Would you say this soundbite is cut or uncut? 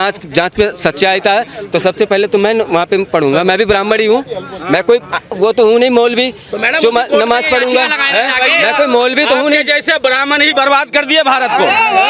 uncut